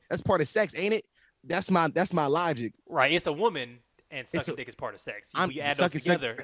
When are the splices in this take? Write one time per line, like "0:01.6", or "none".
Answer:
0:02.8